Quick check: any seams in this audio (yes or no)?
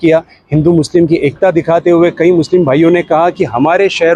no